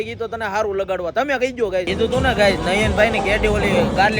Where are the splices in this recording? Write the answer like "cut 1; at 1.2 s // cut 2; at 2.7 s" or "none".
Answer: cut 1; at 1.9 s